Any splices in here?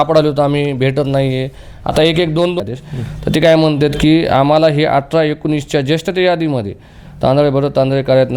yes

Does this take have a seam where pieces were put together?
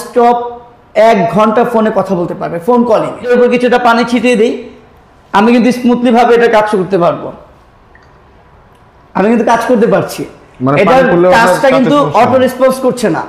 yes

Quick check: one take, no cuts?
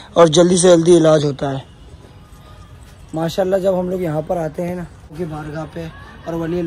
yes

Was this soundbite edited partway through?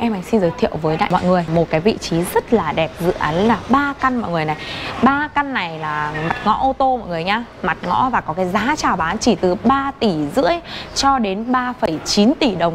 yes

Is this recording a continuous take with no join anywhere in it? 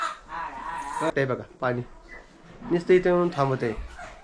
no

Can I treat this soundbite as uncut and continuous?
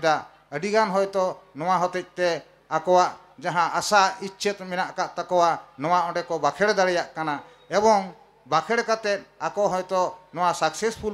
yes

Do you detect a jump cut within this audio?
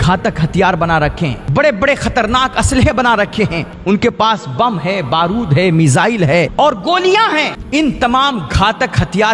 yes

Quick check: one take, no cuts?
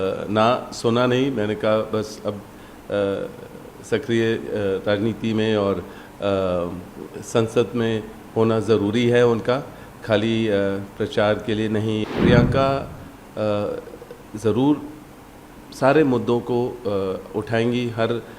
no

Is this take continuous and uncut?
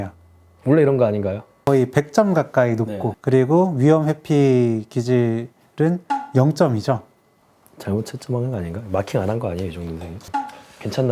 no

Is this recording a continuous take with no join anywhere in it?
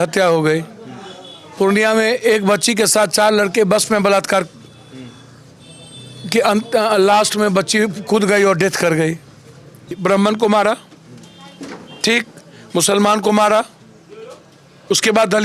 no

